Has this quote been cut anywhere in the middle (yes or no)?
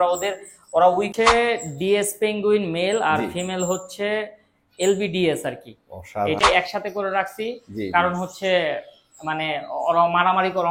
yes